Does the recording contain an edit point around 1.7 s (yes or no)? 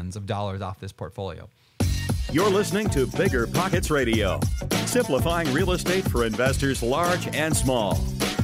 yes